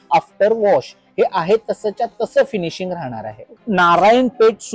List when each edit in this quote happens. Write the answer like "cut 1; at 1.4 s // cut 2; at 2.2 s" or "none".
cut 1; at 3.5 s